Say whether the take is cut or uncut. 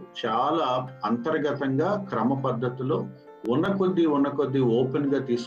uncut